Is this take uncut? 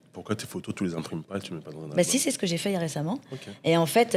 yes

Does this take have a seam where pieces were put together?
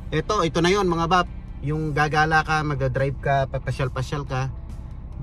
no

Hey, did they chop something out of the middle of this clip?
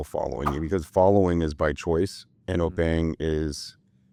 no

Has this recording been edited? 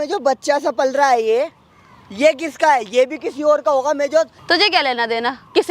yes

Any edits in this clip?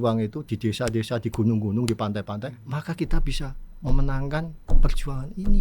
yes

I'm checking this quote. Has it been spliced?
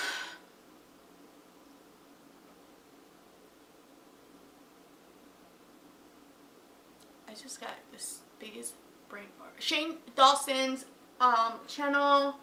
no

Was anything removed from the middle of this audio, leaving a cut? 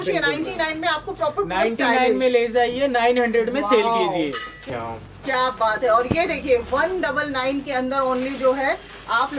yes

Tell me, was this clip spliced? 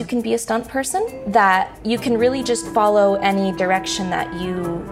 yes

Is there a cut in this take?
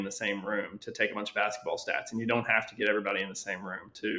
no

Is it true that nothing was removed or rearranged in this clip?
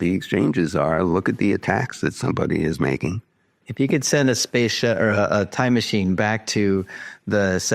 no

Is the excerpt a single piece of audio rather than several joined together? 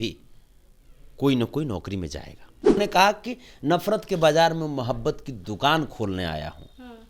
no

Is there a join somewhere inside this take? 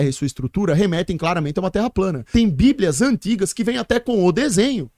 yes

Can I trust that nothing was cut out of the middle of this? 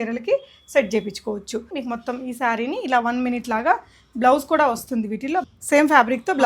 no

